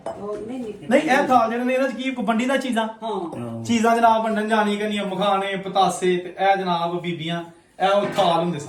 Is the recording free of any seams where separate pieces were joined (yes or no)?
yes